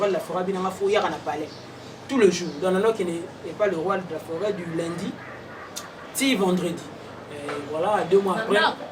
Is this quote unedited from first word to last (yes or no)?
yes